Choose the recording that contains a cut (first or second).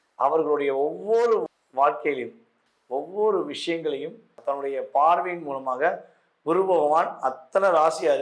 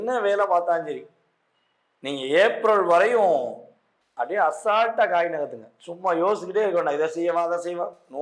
first